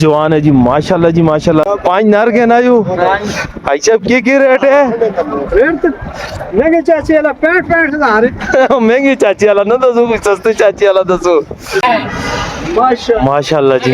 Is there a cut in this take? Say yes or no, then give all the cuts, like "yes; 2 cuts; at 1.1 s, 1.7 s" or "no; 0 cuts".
yes; 2 cuts; at 1.7 s, 11.8 s